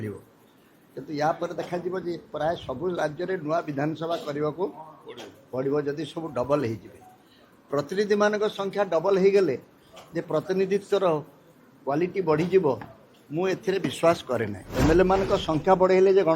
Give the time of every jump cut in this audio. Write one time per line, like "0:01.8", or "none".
0:14.6